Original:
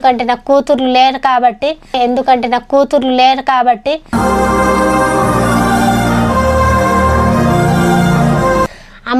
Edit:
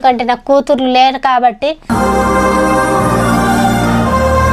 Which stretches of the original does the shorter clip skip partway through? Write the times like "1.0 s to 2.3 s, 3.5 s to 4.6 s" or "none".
1.7 s to 4.0 s